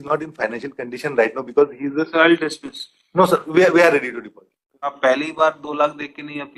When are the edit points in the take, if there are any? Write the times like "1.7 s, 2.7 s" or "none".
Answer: 4.9 s